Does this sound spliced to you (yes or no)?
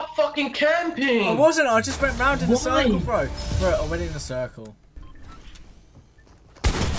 yes